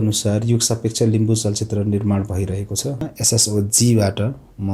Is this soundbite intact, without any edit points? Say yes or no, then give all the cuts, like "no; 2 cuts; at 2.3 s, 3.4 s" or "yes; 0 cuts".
no; 1 cut; at 3.1 s